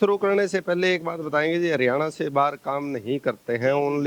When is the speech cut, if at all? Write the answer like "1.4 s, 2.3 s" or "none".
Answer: none